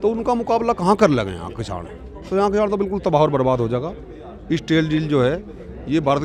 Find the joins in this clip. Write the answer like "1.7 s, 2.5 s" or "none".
none